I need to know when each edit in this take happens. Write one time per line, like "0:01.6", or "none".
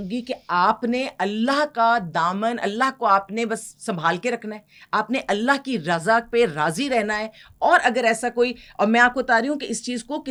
none